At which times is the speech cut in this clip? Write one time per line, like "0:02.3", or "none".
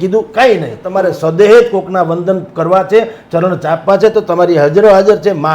0:00.9